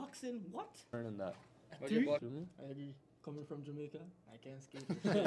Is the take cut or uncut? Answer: cut